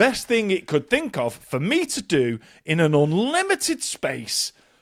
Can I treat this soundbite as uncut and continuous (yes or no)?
yes